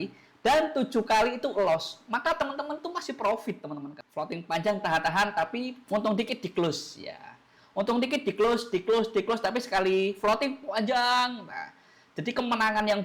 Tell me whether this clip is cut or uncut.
cut